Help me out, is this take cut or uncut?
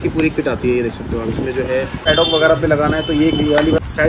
uncut